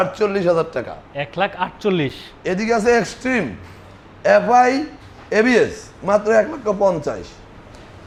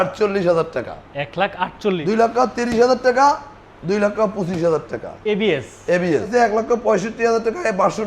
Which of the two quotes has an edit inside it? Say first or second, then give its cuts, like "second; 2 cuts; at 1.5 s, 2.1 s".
second; 2 cuts; at 2.0 s, 6.3 s